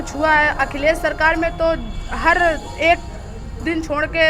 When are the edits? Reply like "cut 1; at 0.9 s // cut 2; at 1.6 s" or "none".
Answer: none

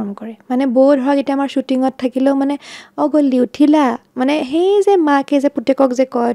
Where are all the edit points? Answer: none

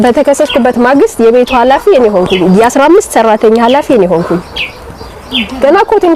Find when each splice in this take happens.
none

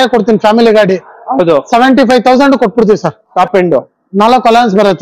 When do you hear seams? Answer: cut 1; at 3.3 s

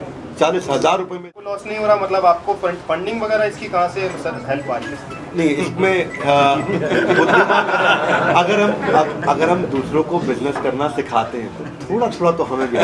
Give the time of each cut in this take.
cut 1; at 1.3 s

